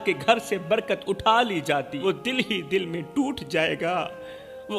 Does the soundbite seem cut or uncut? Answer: cut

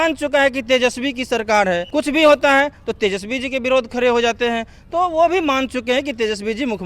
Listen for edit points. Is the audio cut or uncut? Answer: cut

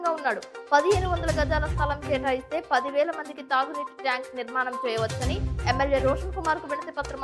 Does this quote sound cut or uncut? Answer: uncut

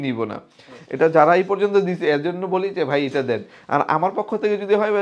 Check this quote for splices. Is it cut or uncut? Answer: uncut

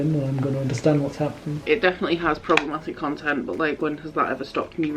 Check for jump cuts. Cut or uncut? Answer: cut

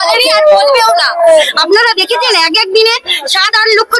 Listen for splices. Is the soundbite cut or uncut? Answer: cut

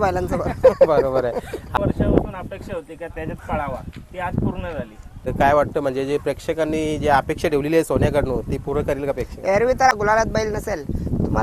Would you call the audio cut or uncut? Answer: cut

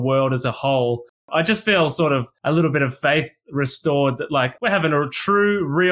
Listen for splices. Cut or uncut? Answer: cut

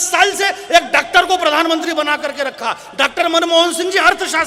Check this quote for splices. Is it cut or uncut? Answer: uncut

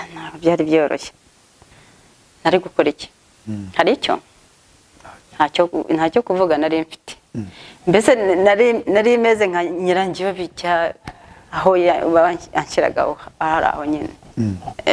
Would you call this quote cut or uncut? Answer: cut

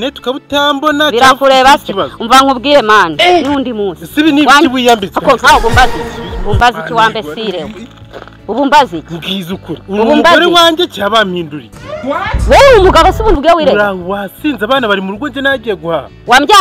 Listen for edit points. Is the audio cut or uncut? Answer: uncut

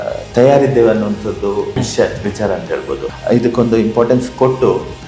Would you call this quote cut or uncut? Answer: cut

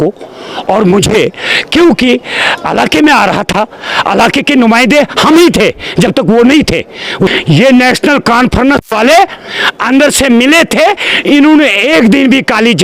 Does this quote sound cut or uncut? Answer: cut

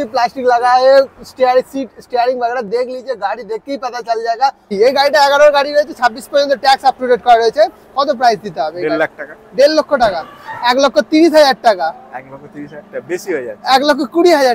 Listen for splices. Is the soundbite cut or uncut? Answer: cut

